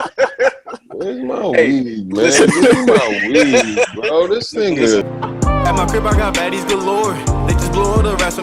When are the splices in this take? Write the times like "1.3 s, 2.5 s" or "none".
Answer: 5.0 s